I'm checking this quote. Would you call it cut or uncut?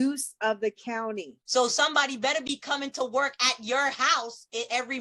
cut